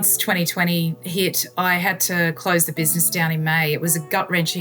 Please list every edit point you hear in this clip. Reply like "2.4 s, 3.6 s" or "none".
1.0 s